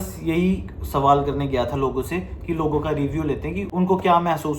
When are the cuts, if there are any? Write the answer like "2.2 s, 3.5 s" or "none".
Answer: 3.7 s